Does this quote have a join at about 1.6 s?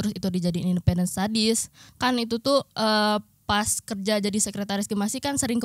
no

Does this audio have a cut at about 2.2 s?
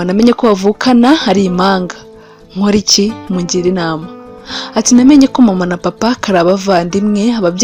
no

